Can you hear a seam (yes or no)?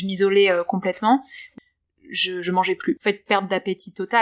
yes